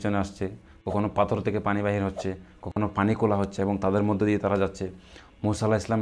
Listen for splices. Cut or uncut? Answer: uncut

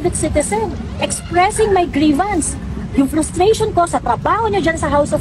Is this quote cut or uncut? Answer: uncut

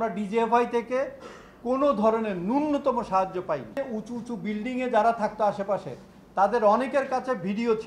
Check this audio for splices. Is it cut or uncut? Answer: cut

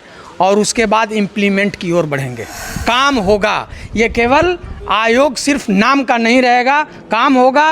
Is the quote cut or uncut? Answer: cut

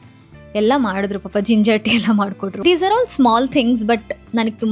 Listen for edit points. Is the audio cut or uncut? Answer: cut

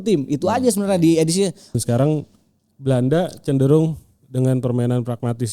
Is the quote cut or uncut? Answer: cut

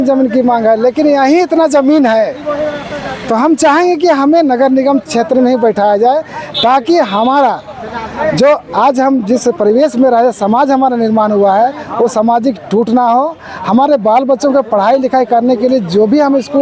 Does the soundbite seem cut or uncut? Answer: uncut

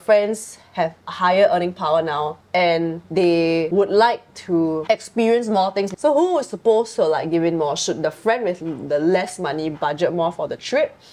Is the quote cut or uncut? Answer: cut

